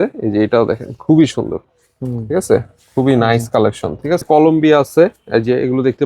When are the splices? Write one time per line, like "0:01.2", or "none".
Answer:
0:04.2